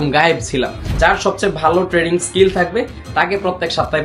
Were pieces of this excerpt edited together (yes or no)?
yes